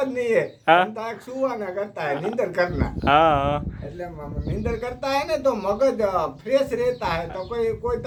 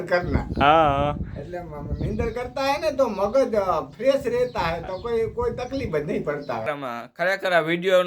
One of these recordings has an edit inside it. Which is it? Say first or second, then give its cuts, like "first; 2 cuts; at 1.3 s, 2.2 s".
second; 1 cut; at 6.7 s